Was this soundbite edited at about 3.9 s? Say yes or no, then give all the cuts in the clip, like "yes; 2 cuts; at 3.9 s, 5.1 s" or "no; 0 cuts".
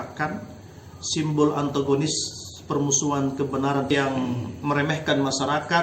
yes; 1 cut; at 3.9 s